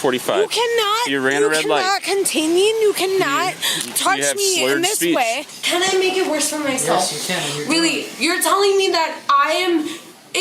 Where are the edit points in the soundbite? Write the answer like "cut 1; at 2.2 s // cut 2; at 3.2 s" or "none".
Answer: cut 1; at 5.5 s